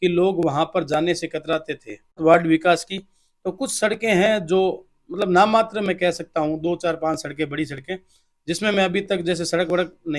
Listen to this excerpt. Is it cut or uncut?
cut